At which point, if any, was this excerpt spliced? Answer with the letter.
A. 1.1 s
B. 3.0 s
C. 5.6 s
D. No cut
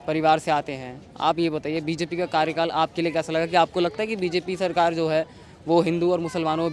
D